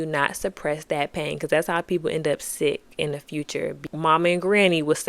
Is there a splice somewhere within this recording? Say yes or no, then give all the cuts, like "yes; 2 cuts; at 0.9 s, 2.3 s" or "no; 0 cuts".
yes; 1 cut; at 3.8 s